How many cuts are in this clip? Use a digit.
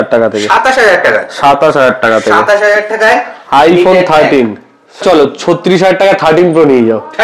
1